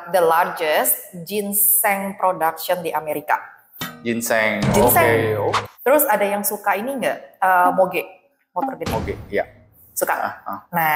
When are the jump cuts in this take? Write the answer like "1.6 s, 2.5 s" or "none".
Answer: 5.6 s

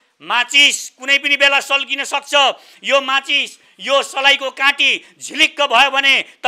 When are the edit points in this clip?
none

